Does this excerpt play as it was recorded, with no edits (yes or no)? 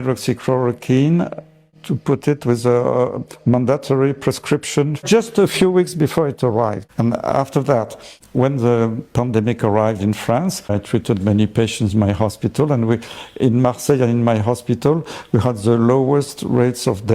no